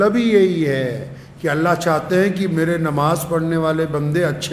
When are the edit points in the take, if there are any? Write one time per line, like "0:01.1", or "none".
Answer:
none

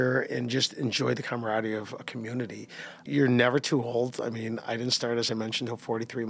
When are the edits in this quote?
0:03.1

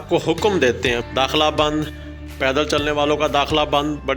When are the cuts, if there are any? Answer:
0:01.0

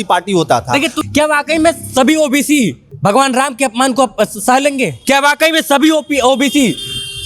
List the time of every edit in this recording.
0:00.9
0:02.9
0:05.0

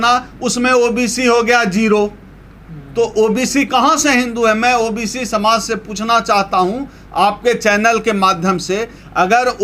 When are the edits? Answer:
none

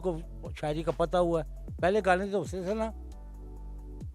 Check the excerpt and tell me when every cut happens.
none

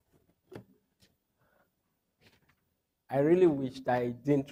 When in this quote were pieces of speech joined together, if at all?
none

